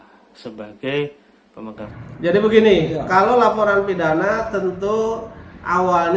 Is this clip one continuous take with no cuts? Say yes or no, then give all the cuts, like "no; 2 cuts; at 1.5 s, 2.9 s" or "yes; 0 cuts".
no; 1 cut; at 1.9 s